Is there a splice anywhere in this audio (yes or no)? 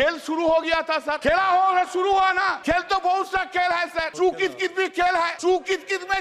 yes